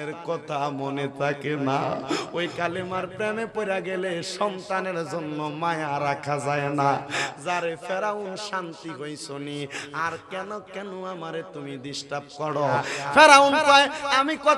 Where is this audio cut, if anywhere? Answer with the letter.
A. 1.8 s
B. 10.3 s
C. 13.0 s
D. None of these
C